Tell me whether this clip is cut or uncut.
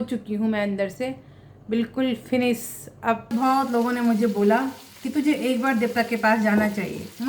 cut